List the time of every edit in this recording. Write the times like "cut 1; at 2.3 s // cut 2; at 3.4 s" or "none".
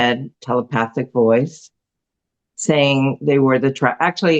none